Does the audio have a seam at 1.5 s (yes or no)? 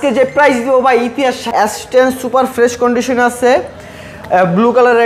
yes